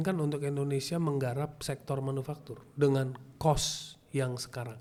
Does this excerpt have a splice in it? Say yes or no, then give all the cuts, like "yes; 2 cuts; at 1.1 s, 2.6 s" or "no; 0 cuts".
no; 0 cuts